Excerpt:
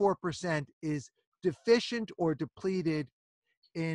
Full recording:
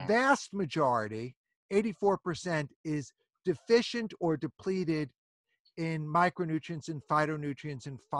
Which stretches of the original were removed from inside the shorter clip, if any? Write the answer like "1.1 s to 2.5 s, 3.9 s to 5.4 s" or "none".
none